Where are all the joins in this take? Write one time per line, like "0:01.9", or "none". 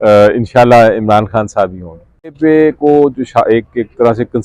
0:02.4